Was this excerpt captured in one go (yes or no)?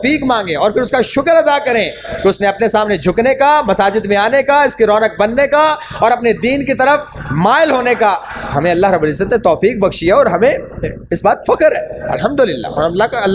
yes